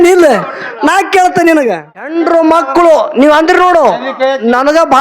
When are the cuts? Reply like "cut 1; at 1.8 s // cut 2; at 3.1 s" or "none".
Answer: cut 1; at 2.1 s